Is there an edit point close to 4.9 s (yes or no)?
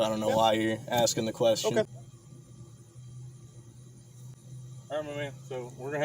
no